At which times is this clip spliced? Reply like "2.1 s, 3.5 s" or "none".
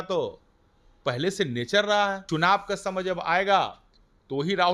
2.2 s